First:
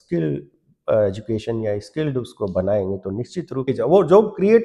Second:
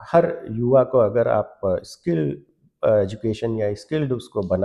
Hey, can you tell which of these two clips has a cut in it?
first; 1 cut; at 3.6 s

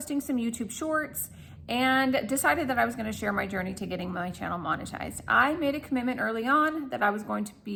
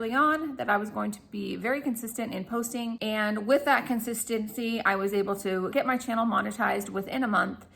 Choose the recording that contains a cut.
second; 2 cuts; at 3.1 s, 5.7 s

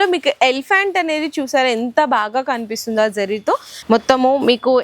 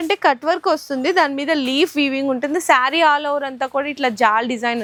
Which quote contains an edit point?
first; 1 cut; at 3.7 s

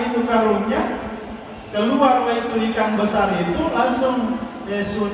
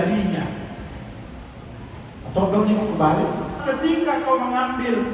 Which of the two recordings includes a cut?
second; 1 cut; at 3.6 s

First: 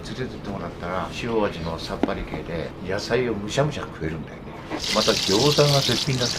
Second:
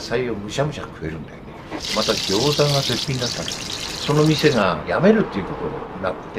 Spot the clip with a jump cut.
first; 1 cut; at 1.1 s

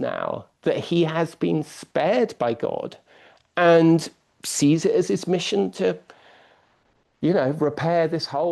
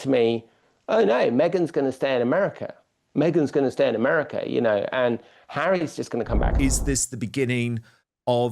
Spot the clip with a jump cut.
second; 1 cut; at 6.5 s

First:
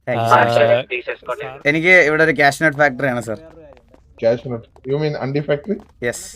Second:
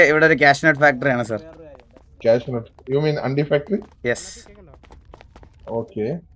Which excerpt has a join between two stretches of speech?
first; 1 cut; at 0.9 s

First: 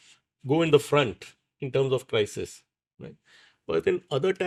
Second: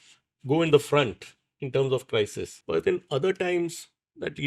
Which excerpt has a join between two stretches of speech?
second; 1 cut; at 2.5 s

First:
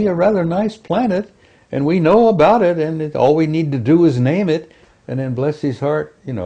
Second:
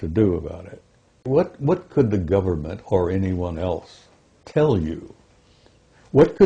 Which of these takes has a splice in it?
second; 1 cut; at 1.2 s

